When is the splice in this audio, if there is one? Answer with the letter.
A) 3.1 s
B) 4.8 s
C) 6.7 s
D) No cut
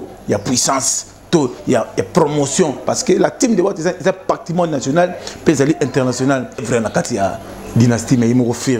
C